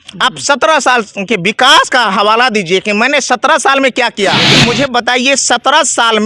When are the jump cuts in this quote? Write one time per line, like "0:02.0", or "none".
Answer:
0:04.5